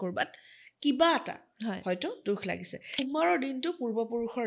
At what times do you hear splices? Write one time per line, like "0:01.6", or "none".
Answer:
0:03.0